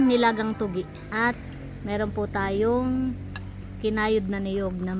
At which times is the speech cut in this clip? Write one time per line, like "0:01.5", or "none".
0:01.1